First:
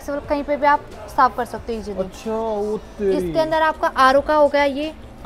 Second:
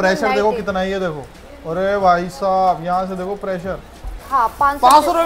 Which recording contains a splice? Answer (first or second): second